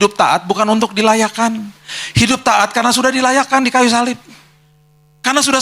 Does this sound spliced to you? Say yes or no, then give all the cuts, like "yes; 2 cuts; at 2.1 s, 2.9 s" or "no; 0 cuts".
no; 0 cuts